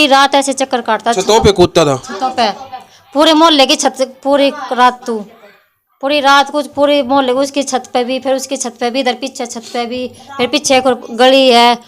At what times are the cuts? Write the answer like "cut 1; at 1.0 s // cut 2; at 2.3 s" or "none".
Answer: none